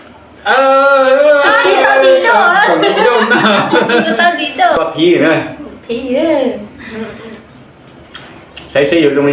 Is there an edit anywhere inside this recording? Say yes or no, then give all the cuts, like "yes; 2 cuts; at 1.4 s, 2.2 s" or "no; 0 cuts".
yes; 1 cut; at 4.8 s